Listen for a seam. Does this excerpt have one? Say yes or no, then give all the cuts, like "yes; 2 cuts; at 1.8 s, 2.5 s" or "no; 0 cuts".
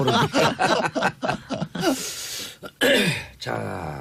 yes; 1 cut; at 0.9 s